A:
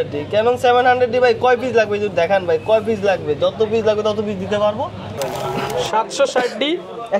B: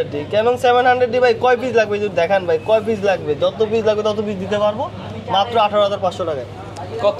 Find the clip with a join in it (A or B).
A